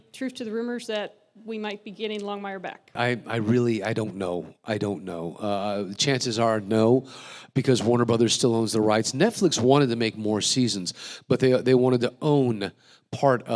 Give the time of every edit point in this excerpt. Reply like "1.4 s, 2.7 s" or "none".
2.9 s